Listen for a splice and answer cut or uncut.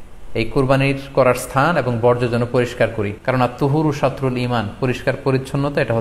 cut